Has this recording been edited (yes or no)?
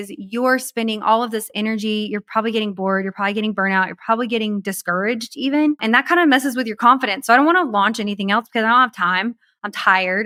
no